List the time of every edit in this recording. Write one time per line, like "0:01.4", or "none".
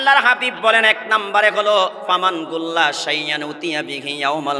none